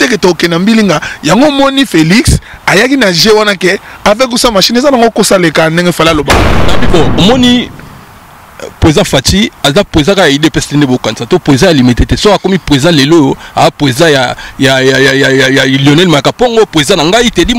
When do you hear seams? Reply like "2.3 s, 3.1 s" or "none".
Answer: 6.8 s